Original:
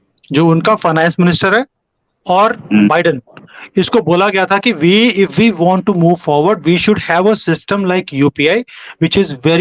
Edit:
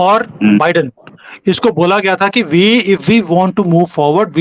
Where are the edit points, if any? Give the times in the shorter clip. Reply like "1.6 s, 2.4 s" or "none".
none